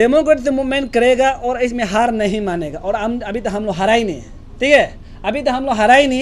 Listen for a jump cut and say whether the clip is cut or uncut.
uncut